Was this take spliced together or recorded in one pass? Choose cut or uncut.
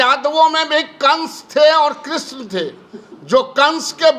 uncut